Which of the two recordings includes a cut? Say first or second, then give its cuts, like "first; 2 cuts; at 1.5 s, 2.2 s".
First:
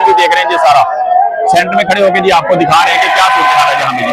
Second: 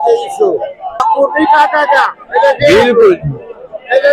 second; 1 cut; at 1.0 s